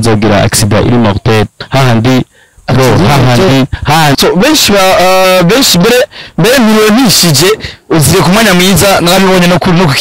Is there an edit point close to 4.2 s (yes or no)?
yes